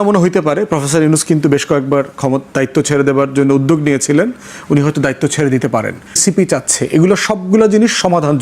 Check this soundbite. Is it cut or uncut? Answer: cut